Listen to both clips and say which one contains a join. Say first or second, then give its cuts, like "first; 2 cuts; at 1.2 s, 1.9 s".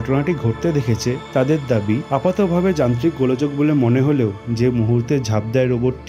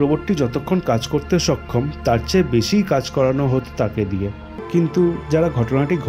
second; 1 cut; at 4.6 s